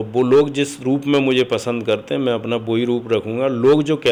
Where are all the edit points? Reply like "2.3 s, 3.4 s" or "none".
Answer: none